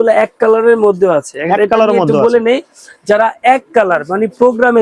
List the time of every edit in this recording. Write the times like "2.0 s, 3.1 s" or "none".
none